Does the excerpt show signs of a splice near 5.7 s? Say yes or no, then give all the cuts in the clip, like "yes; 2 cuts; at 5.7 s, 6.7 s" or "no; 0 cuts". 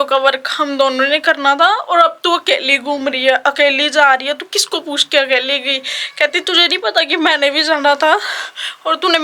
no; 0 cuts